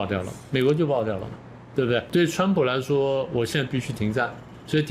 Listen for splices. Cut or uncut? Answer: cut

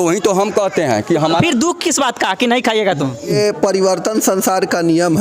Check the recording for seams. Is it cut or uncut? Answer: cut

